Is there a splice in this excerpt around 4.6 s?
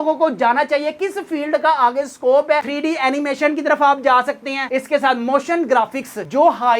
yes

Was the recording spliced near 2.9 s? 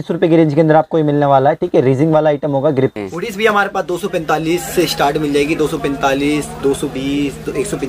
yes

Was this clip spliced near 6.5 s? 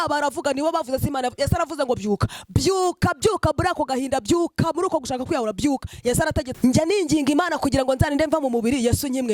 yes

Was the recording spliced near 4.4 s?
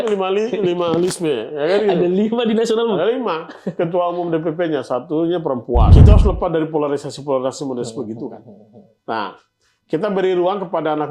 no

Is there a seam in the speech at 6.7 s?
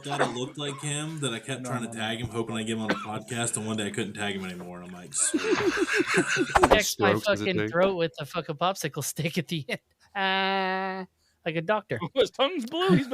yes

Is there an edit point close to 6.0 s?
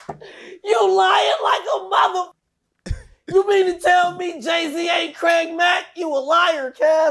no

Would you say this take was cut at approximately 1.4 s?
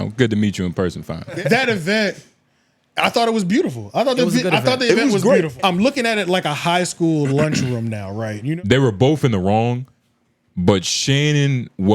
yes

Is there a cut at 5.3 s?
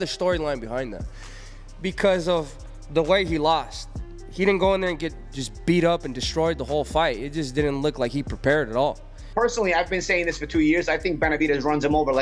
no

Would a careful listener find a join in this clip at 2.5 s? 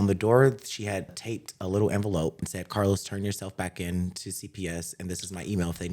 yes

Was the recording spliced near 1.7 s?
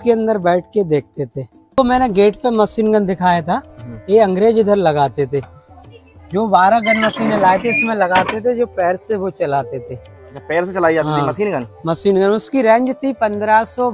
yes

